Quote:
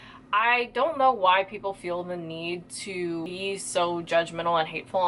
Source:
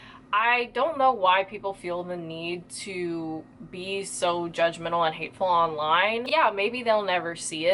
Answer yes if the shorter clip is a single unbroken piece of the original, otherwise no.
no